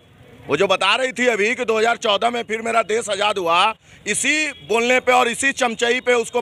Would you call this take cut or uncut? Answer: uncut